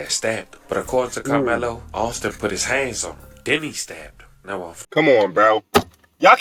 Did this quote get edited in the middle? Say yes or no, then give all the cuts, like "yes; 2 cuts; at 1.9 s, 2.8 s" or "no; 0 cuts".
no; 0 cuts